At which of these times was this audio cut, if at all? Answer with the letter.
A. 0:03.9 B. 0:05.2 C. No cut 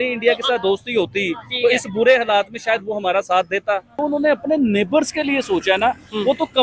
A